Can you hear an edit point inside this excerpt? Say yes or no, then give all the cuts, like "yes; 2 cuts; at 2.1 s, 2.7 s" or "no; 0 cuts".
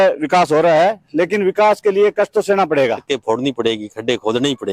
yes; 1 cut; at 3.1 s